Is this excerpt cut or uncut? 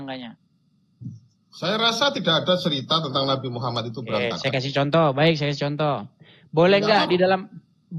uncut